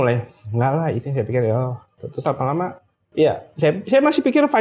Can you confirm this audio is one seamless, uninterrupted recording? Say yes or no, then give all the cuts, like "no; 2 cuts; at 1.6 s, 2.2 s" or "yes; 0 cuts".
no; 1 cut; at 1.9 s